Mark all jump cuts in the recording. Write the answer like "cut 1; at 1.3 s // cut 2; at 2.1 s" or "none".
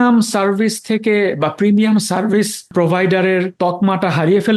cut 1; at 2.7 s // cut 2; at 3.5 s